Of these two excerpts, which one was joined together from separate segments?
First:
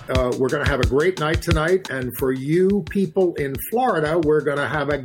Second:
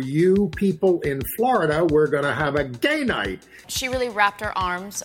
second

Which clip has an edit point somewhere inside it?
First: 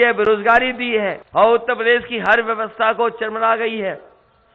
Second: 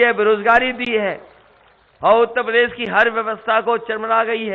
first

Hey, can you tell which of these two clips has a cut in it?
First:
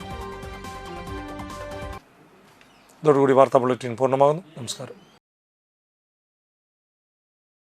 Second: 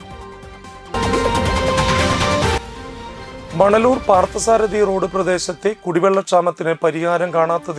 second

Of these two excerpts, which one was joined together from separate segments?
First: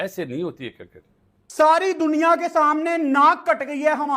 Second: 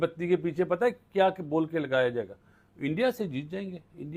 first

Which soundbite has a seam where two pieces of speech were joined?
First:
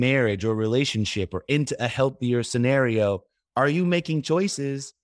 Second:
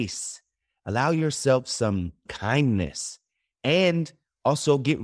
second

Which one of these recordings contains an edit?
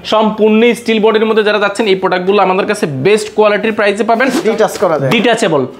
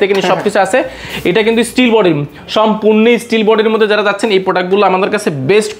first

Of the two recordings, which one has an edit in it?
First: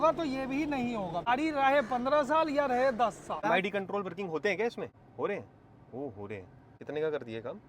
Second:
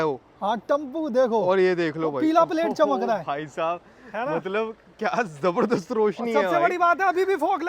first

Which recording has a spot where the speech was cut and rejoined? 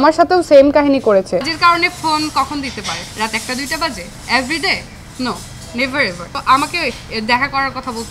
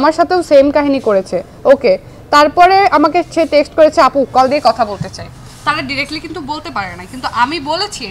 first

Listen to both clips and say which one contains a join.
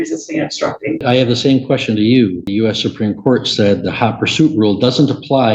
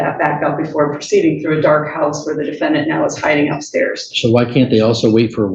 first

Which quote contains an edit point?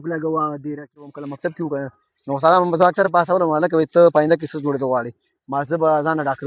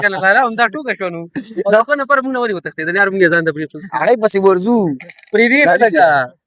first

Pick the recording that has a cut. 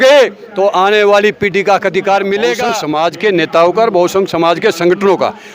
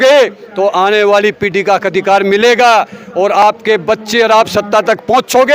first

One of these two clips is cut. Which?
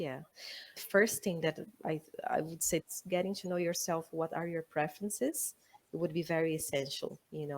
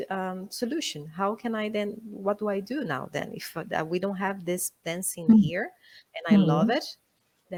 first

